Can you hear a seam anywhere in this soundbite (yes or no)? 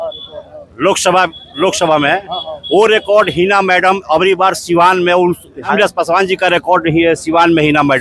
yes